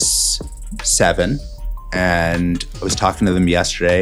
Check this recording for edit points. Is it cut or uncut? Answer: uncut